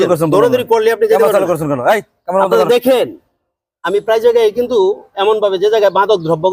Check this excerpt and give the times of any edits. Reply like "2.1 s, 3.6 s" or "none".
none

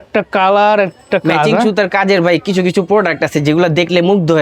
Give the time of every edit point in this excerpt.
none

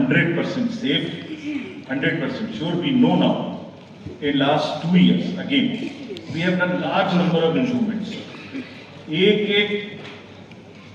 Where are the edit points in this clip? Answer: none

